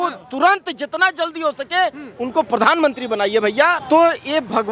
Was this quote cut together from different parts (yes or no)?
yes